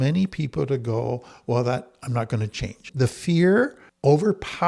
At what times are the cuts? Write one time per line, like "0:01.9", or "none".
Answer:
none